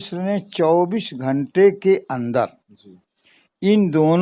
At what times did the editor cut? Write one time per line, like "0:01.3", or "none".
none